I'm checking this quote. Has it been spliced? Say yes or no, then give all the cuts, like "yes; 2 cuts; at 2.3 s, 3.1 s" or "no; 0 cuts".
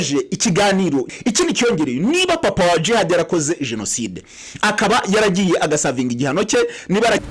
yes; 1 cut; at 1.1 s